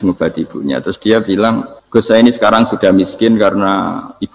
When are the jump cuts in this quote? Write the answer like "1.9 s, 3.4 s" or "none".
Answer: 1.7 s